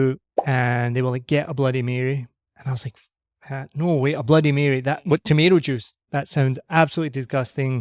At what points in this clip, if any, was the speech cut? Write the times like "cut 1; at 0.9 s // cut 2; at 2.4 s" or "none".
cut 1; at 6.0 s